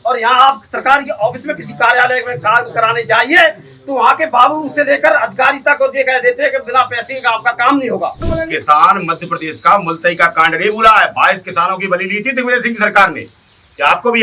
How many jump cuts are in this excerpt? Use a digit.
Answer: 1